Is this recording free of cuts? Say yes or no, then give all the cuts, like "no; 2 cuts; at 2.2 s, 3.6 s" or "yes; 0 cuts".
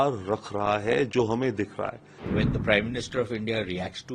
no; 1 cut; at 2.3 s